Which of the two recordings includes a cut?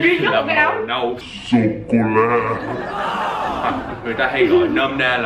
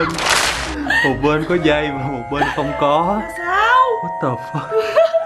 first; 1 cut; at 3.6 s

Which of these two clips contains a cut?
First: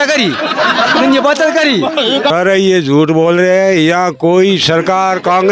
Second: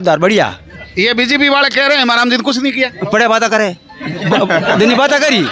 first; 1 cut; at 2.3 s

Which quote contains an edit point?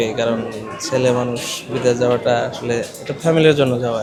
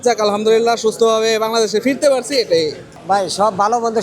second; 1 cut; at 2.9 s

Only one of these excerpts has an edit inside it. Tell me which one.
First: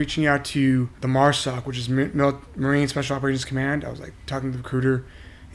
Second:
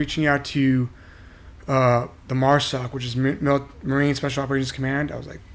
first; 1 cut; at 1.0 s

